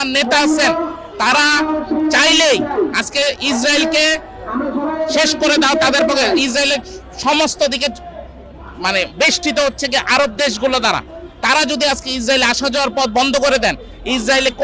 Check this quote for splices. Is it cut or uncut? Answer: uncut